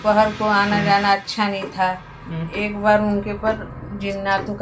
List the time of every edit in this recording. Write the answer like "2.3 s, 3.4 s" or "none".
none